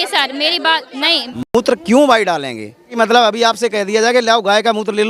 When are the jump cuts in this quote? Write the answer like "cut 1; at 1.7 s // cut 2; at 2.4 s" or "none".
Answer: cut 1; at 1.3 s // cut 2; at 2.9 s